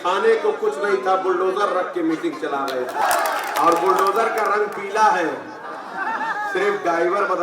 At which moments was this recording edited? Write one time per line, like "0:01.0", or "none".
0:03.0